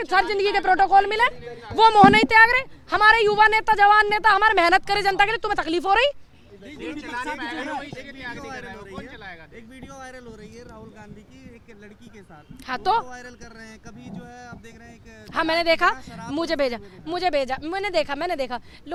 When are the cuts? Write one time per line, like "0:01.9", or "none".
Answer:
none